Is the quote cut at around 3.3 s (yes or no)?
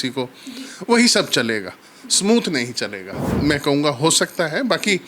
yes